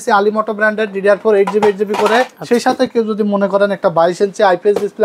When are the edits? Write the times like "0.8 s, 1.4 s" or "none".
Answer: 2.4 s